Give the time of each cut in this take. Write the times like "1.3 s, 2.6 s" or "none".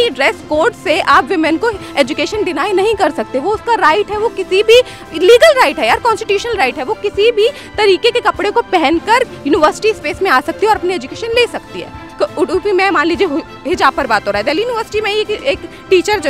none